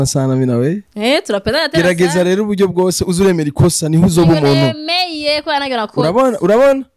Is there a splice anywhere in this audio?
no; 0 cuts

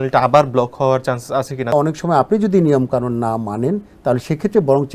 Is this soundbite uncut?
no; 1 cut; at 1.7 s

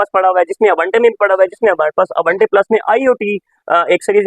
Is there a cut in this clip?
no; 0 cuts

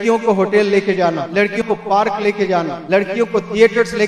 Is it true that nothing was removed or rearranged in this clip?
no; 2 cuts; at 1.6 s, 2.8 s

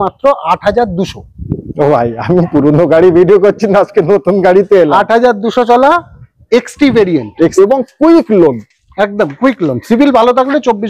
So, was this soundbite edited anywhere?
yes; 1 cut; at 7.5 s

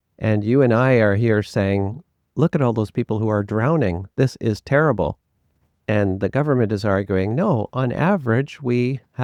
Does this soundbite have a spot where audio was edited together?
no; 0 cuts

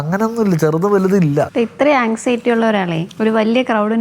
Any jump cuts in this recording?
yes; 2 cuts; at 1.5 s, 3.0 s

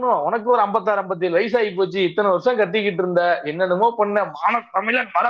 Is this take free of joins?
yes; 0 cuts

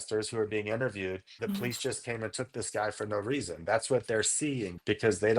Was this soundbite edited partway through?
yes; 1 cut; at 1.3 s

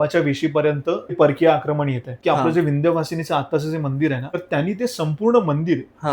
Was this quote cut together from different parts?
yes; 3 cuts; at 1.1 s, 2.2 s, 4.3 s

